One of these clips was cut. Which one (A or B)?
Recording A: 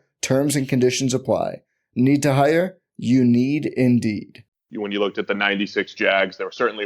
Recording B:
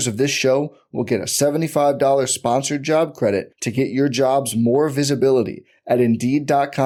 A